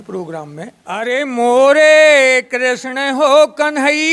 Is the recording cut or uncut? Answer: cut